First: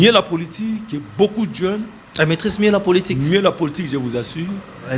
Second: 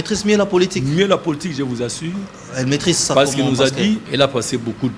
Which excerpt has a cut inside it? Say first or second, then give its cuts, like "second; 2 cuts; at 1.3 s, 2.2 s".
second; 1 cut; at 4.1 s